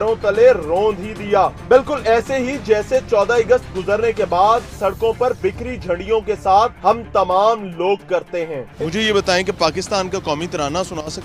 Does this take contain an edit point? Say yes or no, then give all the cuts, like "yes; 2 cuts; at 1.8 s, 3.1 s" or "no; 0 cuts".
yes; 1 cut; at 8.6 s